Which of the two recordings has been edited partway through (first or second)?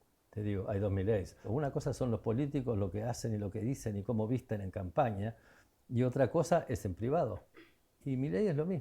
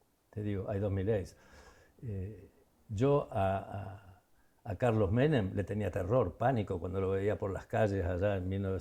first